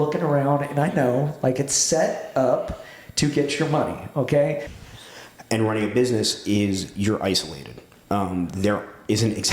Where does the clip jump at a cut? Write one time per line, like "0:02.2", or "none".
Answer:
0:04.7